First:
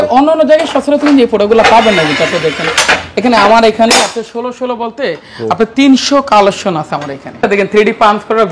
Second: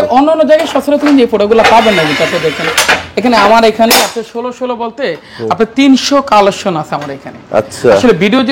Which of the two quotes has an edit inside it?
first; 1 cut; at 7.5 s

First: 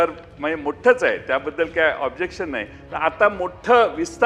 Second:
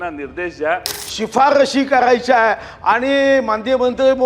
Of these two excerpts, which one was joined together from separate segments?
second; 1 cut; at 1.0 s

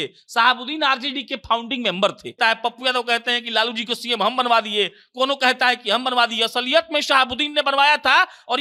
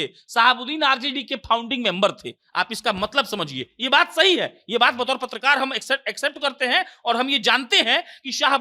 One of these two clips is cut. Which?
first; 1 cut; at 2.4 s

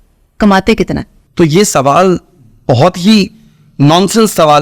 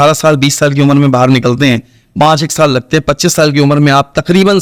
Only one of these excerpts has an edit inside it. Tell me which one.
first; 1 cut; at 1.2 s

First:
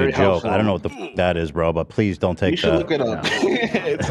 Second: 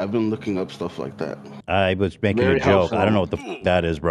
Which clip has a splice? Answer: second; 1 cut; at 1.5 s

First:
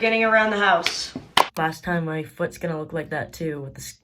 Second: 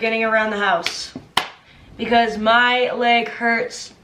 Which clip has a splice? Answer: first; 1 cut; at 1.5 s

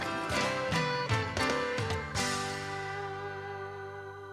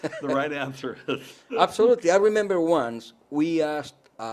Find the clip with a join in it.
second; 1 cut; at 1.3 s

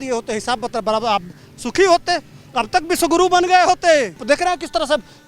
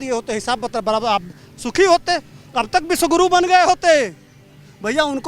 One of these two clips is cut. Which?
first; 1 cut; at 4.2 s

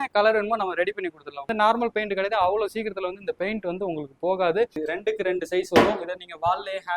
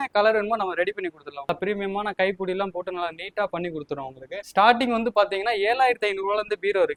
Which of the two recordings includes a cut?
first; 2 cuts; at 1.5 s, 4.7 s

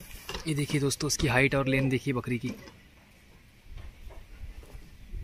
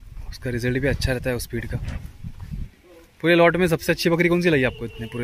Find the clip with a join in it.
second; 1 cut; at 2.7 s

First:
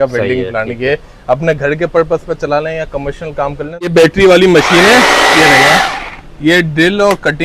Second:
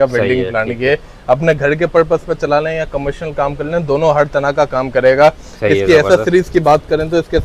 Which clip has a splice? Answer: first; 1 cut; at 3.9 s

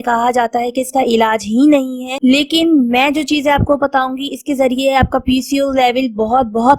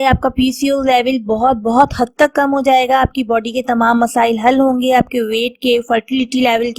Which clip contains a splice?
first; 1 cut; at 2.0 s

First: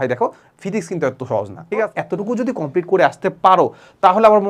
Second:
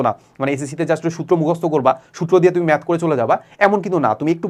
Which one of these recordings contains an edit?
first; 1 cut; at 2.0 s

